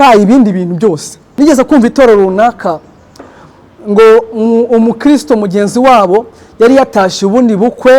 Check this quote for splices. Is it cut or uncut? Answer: cut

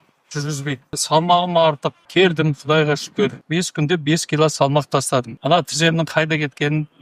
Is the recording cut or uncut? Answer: cut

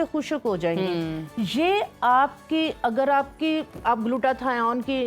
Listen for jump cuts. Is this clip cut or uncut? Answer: uncut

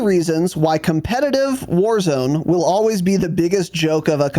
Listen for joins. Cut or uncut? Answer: uncut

